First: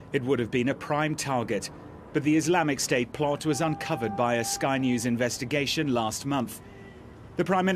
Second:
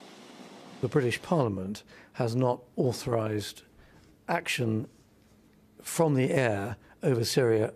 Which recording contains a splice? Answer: first; 1 cut; at 5.2 s

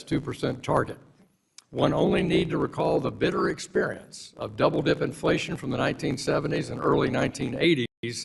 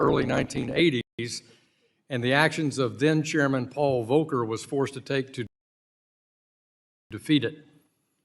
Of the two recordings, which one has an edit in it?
first; 1 cut; at 3.6 s

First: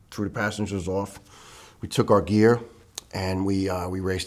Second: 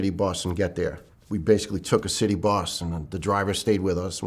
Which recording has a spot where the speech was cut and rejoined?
second; 1 cut; at 1.1 s

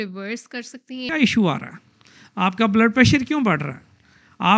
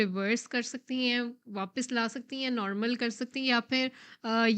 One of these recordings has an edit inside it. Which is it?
first; 1 cut; at 1.1 s

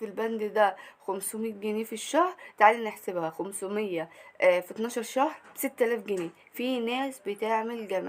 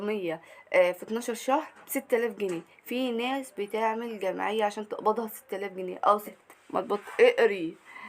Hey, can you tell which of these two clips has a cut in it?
second; 1 cut; at 6.4 s

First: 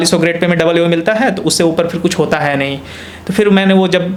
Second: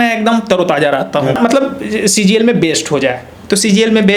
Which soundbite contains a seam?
second; 1 cut; at 1.4 s

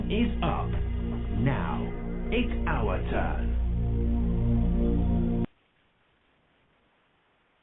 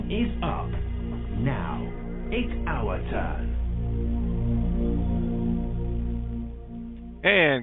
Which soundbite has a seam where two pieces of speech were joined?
second; 1 cut; at 5.4 s

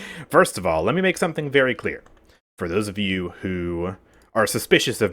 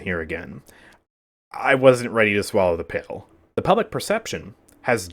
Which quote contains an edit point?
second; 1 cut; at 3.4 s

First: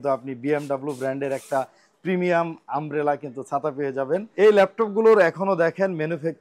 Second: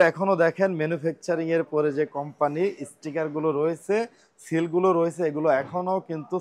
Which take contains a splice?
first; 1 cut; at 4.3 s

